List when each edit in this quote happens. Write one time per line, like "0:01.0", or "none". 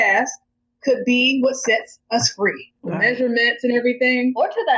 0:02.7